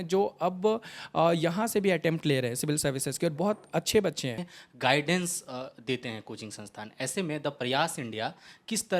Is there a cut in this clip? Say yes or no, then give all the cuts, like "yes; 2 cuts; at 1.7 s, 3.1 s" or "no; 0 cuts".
yes; 1 cut; at 4.5 s